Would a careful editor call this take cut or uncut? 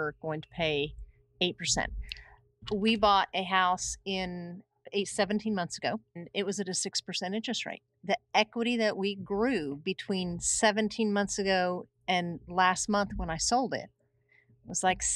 cut